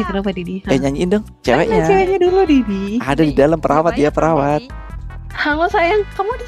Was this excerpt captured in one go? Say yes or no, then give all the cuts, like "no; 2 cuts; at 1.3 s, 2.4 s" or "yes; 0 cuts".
no; 2 cuts; at 1.3 s, 5.4 s